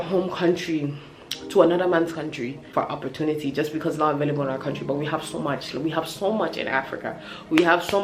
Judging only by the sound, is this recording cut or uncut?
uncut